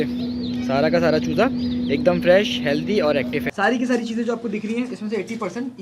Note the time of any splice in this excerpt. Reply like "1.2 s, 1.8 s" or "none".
3.5 s